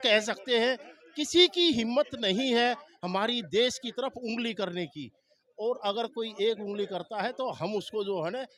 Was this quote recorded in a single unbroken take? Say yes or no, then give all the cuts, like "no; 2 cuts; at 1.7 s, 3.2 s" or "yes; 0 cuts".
yes; 0 cuts